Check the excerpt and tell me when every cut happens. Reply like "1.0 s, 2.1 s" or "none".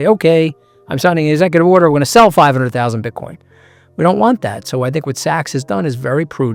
none